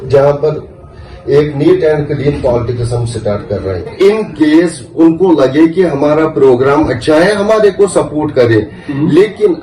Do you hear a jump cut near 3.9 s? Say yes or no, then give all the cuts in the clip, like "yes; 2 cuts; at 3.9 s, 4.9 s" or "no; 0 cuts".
yes; 1 cut; at 3.9 s